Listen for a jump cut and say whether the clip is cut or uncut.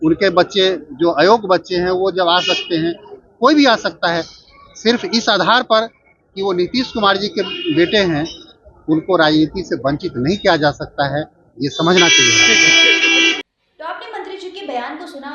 uncut